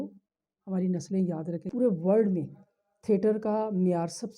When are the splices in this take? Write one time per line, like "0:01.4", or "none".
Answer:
0:01.7